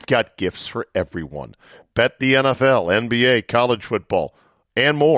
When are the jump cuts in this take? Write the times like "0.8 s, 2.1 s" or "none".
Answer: none